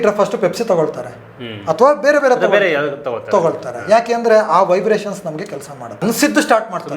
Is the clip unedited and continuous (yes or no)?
no